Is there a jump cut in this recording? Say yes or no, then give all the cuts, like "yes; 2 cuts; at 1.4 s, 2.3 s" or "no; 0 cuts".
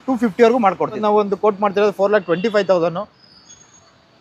yes; 1 cut; at 1.0 s